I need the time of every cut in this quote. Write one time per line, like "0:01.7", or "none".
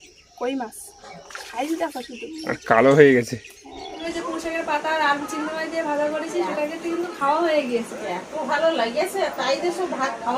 0:04.0